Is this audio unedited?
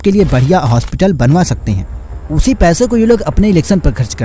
yes; 0 cuts

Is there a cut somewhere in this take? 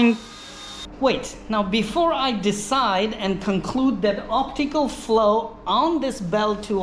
no; 0 cuts

